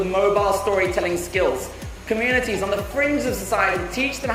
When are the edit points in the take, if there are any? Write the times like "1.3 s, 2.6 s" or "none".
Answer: none